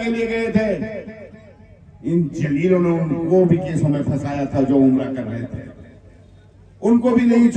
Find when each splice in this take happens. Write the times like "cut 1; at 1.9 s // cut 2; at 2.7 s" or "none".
none